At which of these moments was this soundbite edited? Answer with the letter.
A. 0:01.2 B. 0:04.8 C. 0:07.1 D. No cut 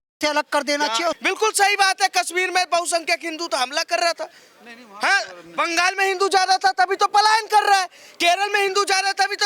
A